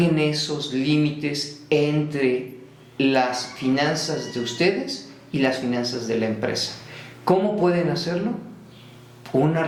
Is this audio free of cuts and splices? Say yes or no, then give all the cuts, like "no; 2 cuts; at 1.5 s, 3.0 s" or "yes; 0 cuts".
yes; 0 cuts